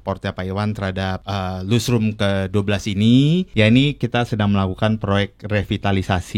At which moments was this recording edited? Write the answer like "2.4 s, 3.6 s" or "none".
1.2 s, 3.5 s